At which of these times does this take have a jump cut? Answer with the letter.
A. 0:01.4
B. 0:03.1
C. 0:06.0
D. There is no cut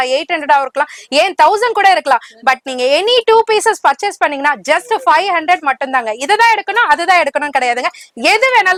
D